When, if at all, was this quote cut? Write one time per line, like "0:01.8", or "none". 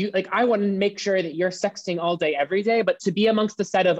0:03.0

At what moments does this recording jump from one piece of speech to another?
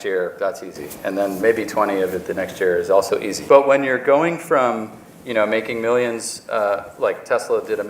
0:03.3

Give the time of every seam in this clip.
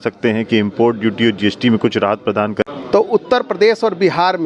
0:02.6

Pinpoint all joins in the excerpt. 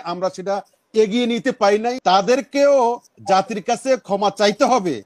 0:02.0

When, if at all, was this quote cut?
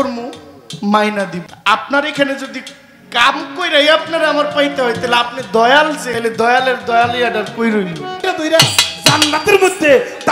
0:01.5
0:06.1
0:08.2

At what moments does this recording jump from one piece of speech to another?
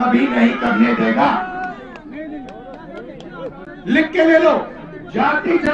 none

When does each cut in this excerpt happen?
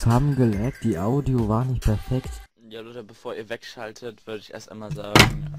0:02.3

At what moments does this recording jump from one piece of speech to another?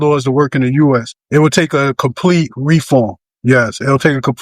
0:01.2
0:03.3

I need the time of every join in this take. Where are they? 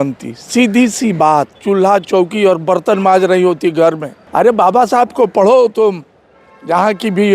0:01.6
0:04.2

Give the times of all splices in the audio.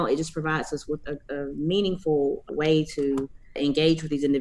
0:01.0
0:02.5
0:03.4

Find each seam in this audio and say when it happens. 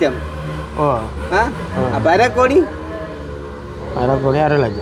none

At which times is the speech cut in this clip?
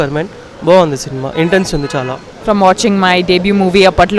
0:02.3

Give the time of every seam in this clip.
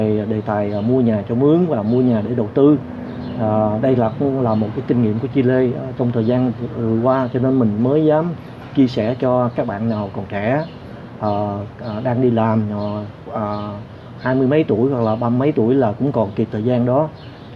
none

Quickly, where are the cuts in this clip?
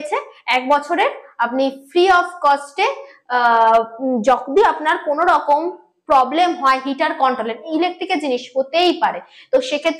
none

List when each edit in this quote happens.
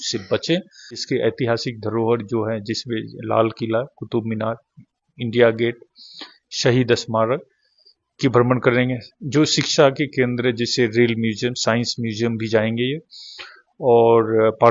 0:01.0

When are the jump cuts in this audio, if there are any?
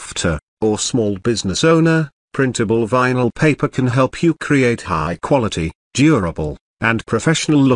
0:05.8
0:06.7

